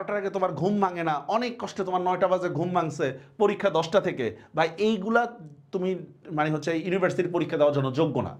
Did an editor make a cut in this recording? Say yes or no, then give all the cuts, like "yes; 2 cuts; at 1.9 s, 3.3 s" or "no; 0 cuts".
no; 0 cuts